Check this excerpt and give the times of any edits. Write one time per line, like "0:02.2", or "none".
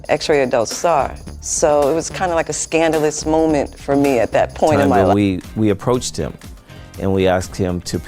0:04.9